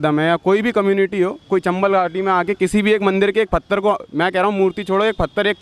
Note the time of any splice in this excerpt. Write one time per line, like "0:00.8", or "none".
none